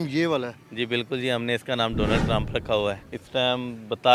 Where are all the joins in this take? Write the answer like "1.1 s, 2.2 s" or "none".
3.1 s